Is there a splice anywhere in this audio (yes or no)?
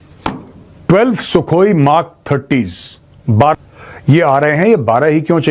yes